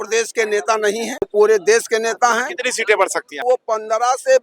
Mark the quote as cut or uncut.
cut